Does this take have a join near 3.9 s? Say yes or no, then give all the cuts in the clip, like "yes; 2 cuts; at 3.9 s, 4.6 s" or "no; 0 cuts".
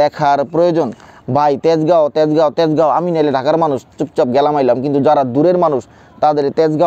no; 1 cut; at 1.1 s